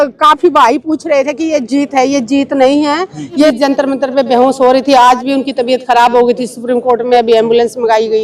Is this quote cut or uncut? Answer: cut